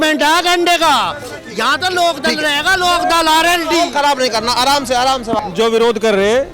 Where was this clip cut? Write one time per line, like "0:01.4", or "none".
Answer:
0:05.4